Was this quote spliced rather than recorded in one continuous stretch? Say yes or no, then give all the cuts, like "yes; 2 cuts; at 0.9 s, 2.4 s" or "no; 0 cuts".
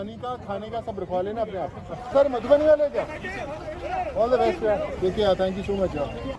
yes; 2 cuts; at 1.9 s, 4.9 s